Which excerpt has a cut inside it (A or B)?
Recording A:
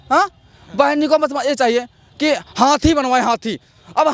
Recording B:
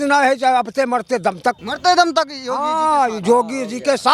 B